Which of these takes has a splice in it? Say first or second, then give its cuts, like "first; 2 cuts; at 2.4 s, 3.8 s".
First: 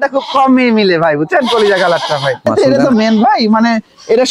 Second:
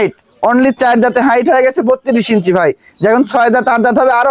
first; 1 cut; at 2.5 s